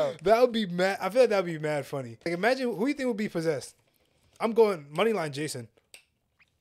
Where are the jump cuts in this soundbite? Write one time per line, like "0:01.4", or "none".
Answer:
0:02.3